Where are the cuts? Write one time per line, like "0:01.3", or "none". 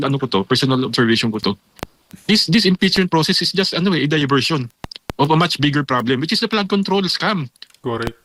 none